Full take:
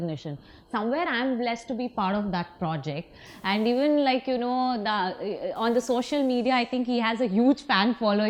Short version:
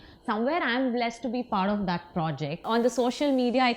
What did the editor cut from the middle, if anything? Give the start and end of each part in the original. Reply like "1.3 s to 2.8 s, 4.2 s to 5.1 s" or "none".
3.1 s to 5.5 s